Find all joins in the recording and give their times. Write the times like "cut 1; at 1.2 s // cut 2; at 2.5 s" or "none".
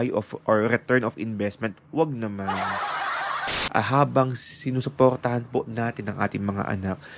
cut 1; at 3.3 s